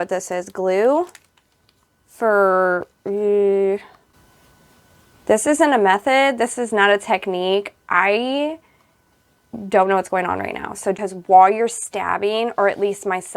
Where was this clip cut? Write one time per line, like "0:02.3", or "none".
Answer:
0:04.1
0:11.0

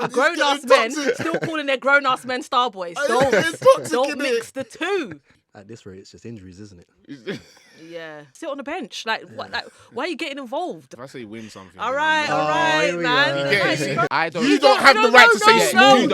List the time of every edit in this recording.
0:05.3
0:08.3
0:10.9
0:14.1

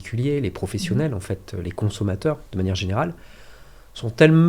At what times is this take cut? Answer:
none

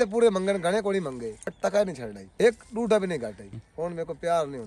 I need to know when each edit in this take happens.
0:01.4
0:02.3
0:03.5

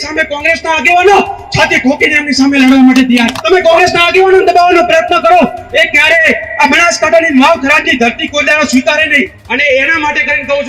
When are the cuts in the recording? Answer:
0:03.4
0:09.4

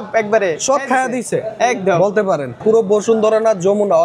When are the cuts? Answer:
0:02.6

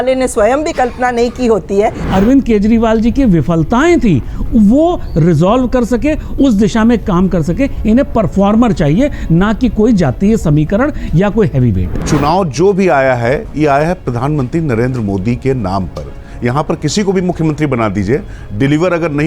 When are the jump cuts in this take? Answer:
0:02.0
0:12.0

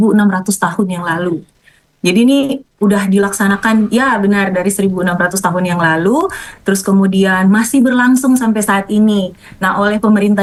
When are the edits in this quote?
none

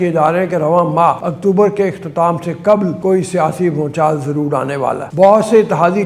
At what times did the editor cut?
0:01.3
0:03.0
0:05.1

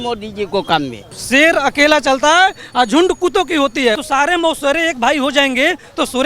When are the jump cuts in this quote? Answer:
0:01.2
0:04.0

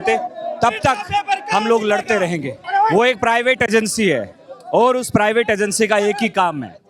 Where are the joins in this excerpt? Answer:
0:02.5

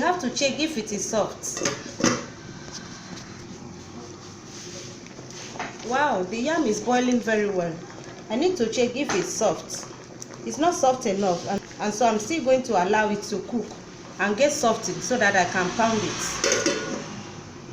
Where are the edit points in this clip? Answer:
0:11.6

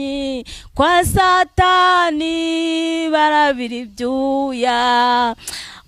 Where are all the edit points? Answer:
none

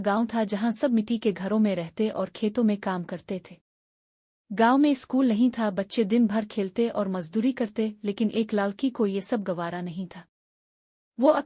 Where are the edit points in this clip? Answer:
0:00.9

